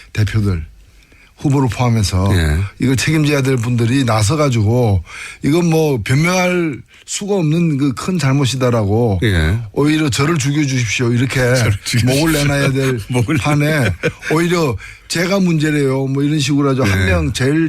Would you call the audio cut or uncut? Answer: cut